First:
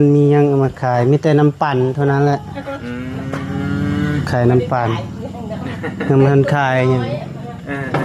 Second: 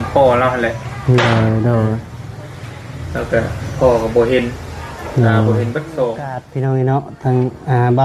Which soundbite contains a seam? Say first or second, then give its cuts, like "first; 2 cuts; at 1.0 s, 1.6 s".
second; 1 cut; at 6.4 s